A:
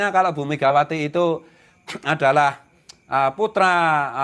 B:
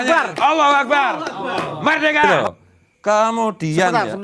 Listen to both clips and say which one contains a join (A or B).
B